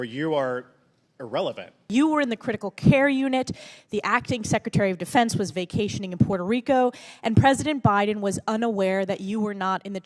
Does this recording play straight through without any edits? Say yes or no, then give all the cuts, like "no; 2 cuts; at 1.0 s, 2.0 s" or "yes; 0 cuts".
no; 1 cut; at 1.9 s